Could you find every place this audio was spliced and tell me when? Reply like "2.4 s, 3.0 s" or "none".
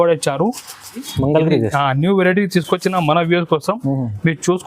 1.1 s